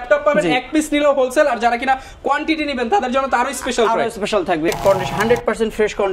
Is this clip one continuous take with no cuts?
no; 1 cut; at 4.7 s

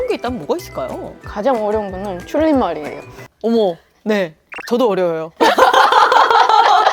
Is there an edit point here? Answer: no; 0 cuts

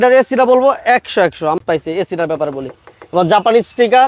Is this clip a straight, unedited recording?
no; 1 cut; at 1.6 s

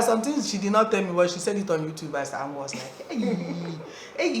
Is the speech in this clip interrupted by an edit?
no; 0 cuts

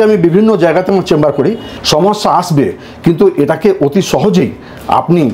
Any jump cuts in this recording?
yes; 1 cut; at 1.7 s

